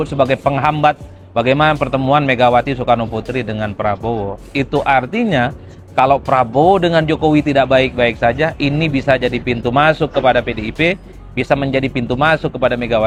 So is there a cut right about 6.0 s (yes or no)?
no